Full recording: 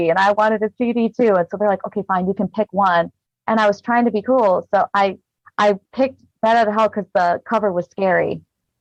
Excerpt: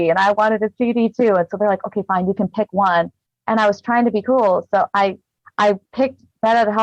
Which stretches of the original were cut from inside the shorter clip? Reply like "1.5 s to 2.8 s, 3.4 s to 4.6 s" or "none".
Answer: none